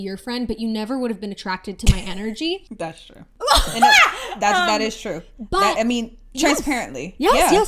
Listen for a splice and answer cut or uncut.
uncut